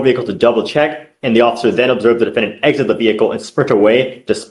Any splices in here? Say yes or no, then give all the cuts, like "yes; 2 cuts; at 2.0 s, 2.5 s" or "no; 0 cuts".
no; 0 cuts